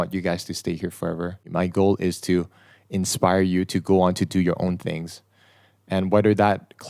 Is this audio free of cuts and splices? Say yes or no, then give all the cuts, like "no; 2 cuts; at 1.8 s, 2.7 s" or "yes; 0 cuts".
no; 1 cut; at 1.5 s